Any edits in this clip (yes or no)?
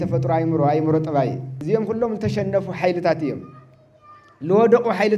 yes